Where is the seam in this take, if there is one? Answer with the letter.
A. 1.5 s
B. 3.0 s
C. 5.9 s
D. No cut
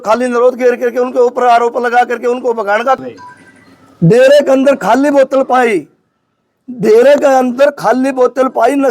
B